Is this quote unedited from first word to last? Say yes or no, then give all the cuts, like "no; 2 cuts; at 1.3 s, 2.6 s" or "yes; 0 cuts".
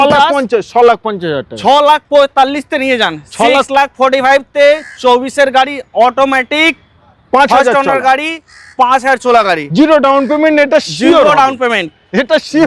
yes; 0 cuts